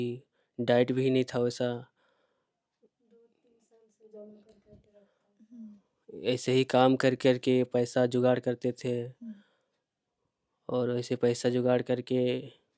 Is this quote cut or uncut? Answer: uncut